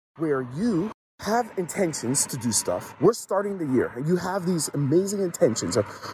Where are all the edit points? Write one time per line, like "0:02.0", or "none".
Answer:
0:01.1